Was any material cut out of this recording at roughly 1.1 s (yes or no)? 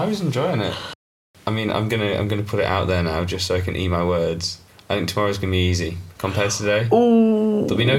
yes